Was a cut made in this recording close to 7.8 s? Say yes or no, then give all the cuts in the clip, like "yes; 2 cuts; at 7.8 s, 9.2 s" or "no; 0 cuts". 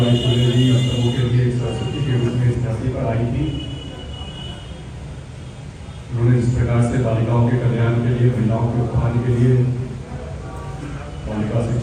no; 0 cuts